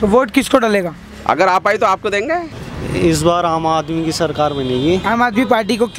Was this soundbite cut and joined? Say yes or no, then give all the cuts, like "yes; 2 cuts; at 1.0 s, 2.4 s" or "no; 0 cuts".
yes; 1 cut; at 2.4 s